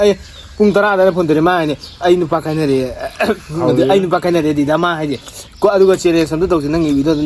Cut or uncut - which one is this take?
uncut